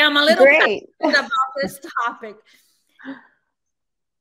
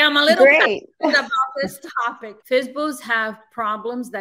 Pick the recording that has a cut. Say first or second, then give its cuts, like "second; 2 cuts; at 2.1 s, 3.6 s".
second; 1 cut; at 2.3 s